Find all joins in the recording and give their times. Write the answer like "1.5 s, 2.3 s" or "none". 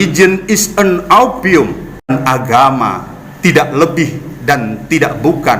2.1 s